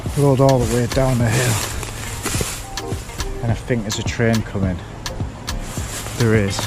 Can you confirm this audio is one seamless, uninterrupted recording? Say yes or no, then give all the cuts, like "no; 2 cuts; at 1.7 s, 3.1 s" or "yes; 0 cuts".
yes; 0 cuts